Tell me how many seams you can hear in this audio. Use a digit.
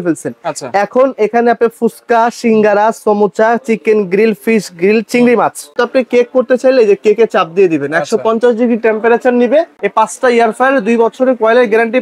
2